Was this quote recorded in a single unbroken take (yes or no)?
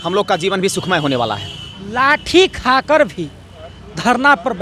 yes